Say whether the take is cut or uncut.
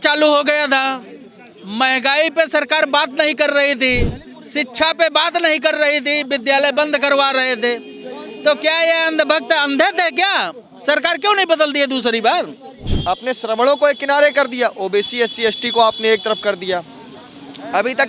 cut